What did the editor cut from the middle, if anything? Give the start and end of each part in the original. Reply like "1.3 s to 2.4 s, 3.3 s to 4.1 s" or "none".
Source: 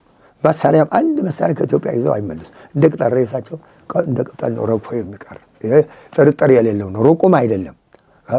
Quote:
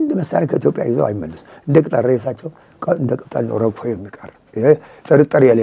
none